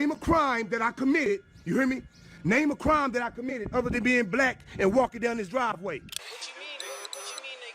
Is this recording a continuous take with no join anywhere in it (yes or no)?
no